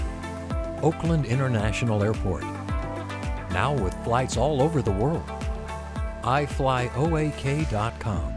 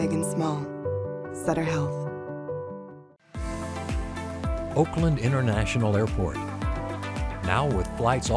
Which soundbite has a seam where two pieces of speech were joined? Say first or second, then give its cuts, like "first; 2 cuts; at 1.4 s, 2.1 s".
second; 1 cut; at 3.0 s